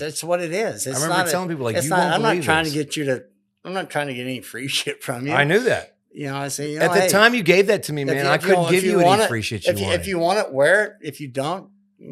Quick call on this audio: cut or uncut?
uncut